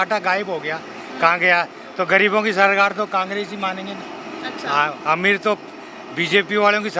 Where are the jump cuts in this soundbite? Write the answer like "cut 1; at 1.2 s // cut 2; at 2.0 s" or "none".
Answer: none